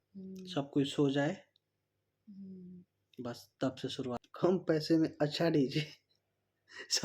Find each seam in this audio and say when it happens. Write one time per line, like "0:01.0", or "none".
0:04.2